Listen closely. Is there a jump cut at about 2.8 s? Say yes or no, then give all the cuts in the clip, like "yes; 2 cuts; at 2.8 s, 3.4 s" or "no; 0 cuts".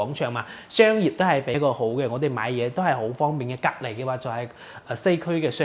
no; 1 cut; at 1.6 s